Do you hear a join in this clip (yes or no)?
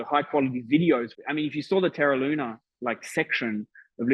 yes